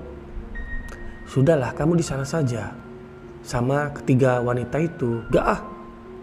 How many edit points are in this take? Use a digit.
1